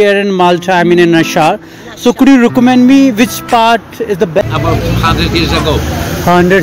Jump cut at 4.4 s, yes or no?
yes